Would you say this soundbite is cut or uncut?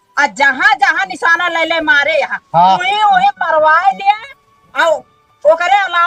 uncut